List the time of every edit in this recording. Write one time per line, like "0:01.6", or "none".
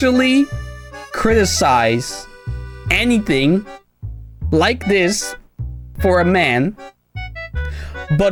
none